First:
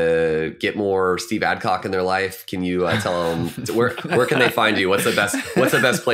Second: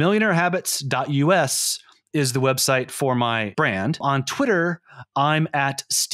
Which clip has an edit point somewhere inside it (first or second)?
second